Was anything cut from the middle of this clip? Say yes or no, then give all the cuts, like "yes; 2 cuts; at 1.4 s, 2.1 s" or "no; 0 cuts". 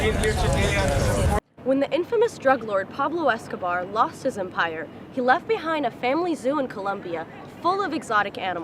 yes; 1 cut; at 1.4 s